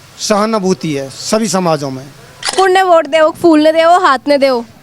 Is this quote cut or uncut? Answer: cut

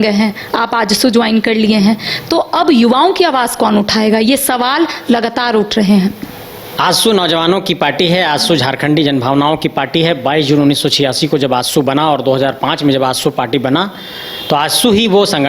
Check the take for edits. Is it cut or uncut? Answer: uncut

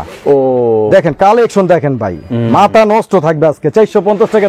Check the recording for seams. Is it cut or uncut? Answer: uncut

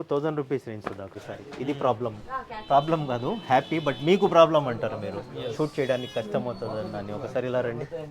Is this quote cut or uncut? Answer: cut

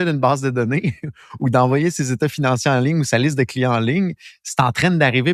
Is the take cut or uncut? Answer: uncut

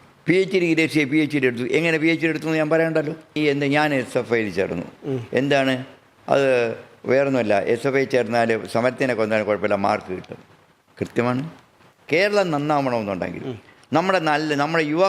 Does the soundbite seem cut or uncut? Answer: cut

